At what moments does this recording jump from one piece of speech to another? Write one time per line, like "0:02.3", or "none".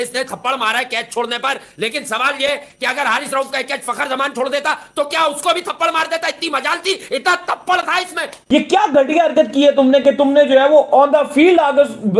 0:08.4